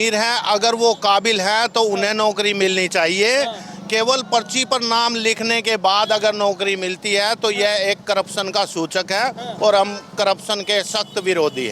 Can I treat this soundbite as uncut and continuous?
yes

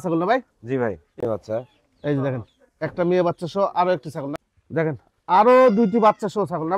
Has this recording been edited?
yes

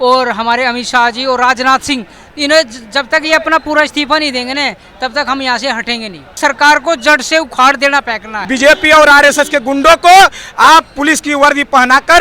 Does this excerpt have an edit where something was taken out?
yes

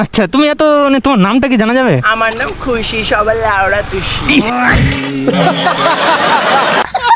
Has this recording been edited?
no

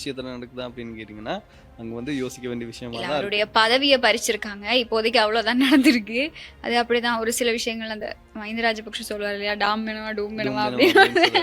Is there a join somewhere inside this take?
no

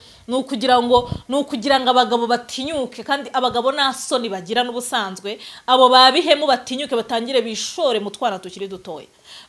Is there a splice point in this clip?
no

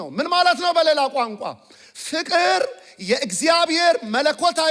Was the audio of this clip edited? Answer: no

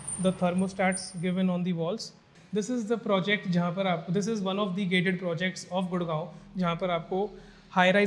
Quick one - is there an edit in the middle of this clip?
yes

